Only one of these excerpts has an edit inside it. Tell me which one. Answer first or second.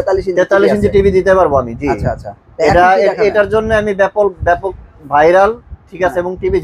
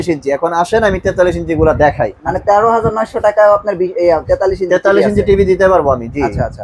second